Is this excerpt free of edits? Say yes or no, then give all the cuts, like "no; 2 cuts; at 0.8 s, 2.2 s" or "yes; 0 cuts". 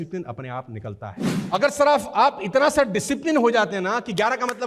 no; 1 cut; at 1.3 s